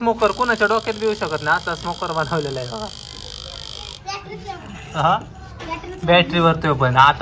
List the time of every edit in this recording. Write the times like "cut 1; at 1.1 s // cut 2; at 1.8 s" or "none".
none